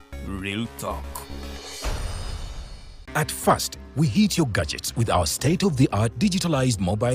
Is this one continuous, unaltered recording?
no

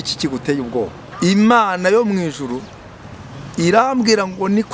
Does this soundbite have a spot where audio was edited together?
yes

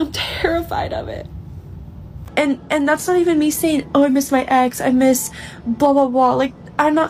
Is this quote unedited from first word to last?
no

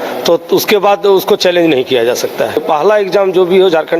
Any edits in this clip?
yes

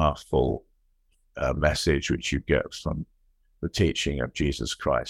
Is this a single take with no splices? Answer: yes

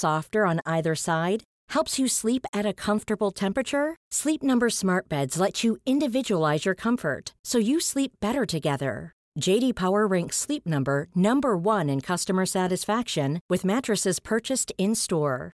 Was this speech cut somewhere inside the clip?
no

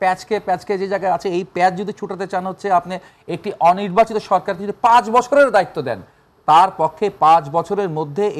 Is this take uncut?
yes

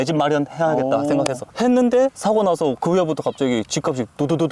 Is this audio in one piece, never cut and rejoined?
no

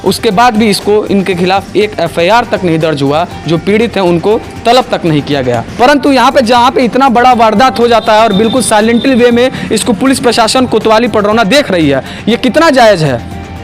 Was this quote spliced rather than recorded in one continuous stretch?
yes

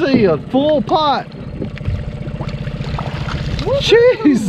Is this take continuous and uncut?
yes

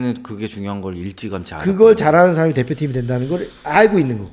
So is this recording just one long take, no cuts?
yes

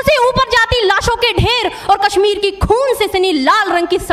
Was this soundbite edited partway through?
no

